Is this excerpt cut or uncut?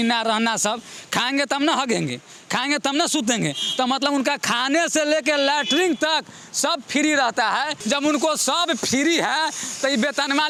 uncut